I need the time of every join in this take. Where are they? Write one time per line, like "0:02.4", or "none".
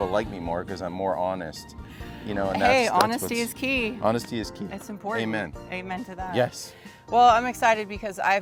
none